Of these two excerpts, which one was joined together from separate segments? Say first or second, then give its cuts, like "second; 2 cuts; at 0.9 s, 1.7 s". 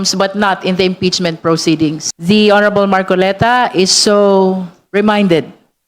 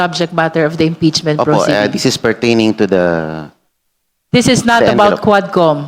first; 1 cut; at 2.1 s